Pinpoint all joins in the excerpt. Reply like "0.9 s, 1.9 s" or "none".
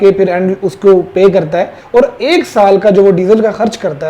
1.8 s